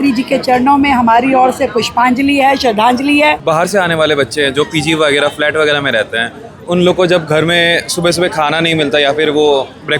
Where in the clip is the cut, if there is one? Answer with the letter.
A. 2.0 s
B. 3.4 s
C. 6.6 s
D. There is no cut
B